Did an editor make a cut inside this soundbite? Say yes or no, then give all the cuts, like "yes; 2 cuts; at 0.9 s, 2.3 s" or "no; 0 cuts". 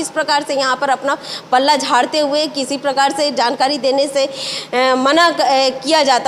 no; 0 cuts